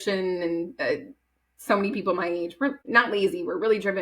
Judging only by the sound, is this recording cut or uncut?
cut